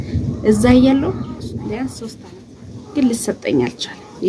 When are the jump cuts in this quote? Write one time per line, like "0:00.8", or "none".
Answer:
0:02.2